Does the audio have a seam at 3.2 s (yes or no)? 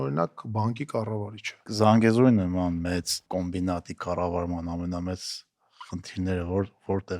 yes